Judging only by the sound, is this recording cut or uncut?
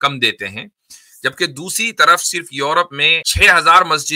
cut